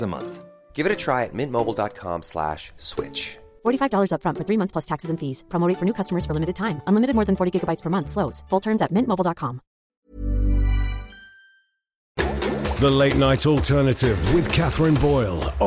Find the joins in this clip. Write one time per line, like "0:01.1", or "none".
0:12.3